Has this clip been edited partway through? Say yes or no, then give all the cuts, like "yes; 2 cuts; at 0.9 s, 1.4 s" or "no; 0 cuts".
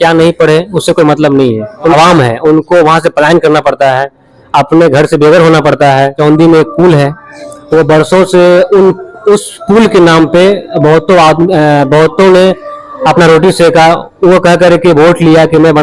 yes; 2 cuts; at 1.9 s, 6.2 s